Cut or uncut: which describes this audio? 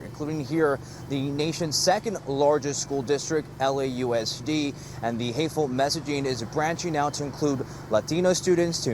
uncut